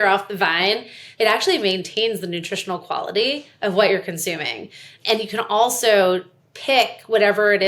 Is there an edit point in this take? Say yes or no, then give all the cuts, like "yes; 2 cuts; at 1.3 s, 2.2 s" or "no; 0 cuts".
yes; 2 cuts; at 1.0 s, 4.9 s